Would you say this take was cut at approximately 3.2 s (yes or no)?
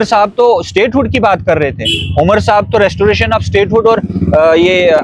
no